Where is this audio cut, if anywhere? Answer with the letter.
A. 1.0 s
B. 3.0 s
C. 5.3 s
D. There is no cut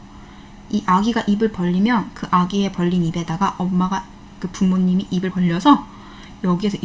C